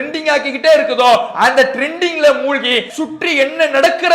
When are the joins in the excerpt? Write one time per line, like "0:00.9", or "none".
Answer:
0:02.9